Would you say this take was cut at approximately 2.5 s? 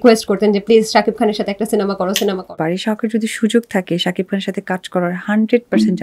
yes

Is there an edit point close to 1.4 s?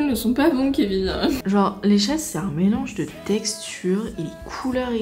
yes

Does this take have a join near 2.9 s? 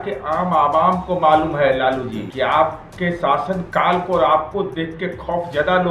yes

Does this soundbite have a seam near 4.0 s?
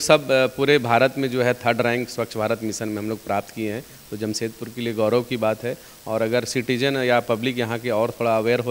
no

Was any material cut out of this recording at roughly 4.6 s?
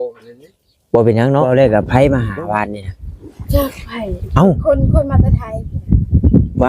no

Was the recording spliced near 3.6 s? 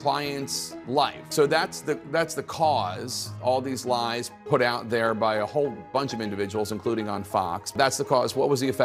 no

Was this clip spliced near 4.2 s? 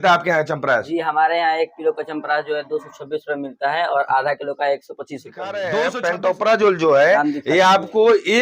no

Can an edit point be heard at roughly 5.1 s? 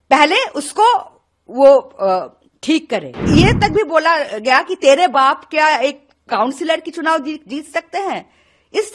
no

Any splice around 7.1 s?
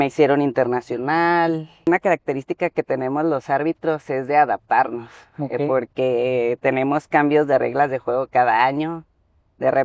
no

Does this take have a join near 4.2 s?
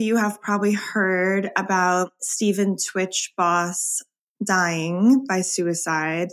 no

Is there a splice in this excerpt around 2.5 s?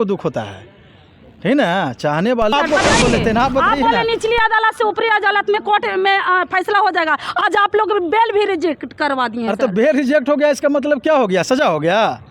yes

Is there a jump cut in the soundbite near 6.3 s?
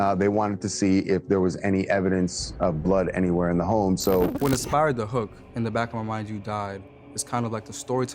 no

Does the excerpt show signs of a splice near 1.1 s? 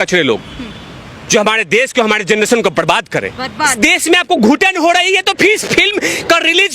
no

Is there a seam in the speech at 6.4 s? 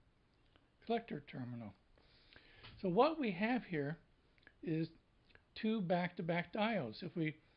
no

